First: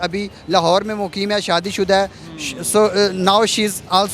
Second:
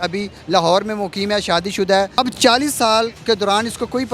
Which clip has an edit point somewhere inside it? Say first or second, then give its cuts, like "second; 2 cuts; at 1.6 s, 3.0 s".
second; 1 cut; at 2.2 s